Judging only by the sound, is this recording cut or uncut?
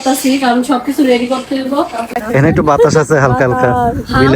cut